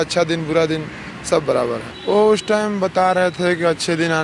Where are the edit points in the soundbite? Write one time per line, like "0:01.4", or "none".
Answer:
0:01.9